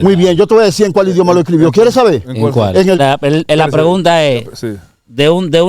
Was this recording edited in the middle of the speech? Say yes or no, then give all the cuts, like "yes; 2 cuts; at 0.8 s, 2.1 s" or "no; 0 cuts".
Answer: yes; 1 cut; at 3.0 s